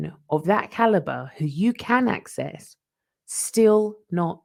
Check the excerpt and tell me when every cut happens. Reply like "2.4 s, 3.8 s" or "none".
none